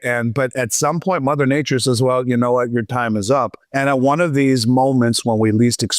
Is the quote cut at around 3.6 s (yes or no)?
yes